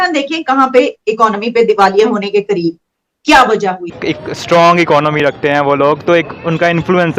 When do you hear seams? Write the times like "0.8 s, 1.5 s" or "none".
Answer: 4.0 s